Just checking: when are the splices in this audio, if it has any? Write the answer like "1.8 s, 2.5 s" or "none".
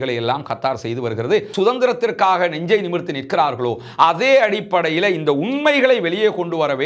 1.5 s